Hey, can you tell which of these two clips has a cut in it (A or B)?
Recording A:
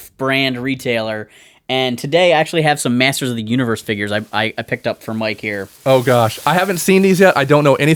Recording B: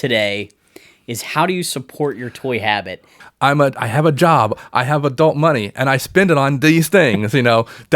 B